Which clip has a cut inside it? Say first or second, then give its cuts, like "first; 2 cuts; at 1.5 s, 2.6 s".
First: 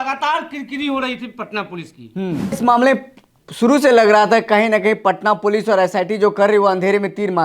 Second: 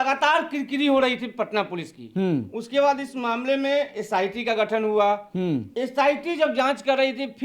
first; 1 cut; at 2.6 s